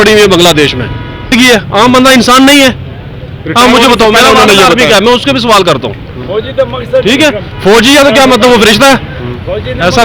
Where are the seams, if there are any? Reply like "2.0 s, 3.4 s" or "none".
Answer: 1.3 s